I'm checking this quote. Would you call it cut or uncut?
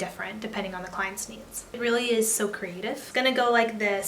cut